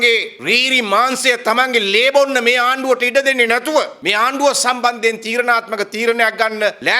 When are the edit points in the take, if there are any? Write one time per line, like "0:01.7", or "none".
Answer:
0:04.0